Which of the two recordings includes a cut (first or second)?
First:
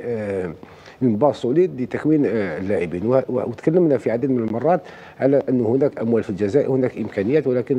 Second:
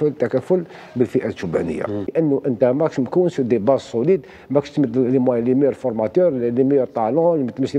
second